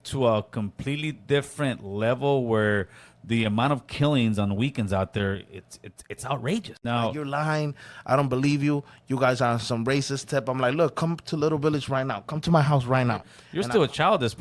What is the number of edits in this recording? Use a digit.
2